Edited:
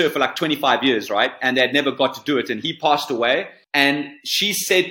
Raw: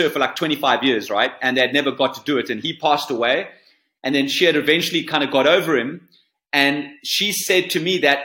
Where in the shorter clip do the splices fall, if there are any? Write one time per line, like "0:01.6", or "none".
0:03.6